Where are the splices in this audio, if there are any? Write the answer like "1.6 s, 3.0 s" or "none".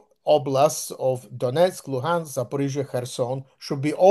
none